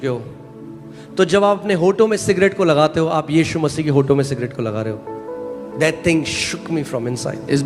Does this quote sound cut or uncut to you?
uncut